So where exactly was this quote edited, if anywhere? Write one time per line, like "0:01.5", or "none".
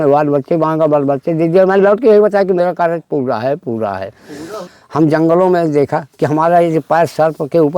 0:04.6